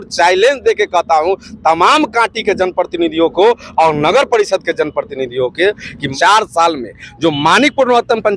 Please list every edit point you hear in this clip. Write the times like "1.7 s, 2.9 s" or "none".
6.1 s